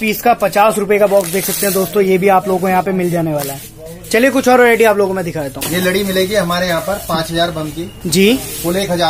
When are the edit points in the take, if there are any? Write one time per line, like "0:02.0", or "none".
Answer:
none